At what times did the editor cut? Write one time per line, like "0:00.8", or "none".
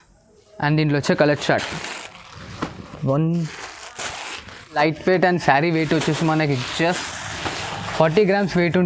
0:04.8